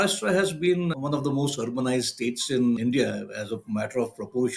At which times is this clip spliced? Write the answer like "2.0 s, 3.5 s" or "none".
0.9 s, 2.8 s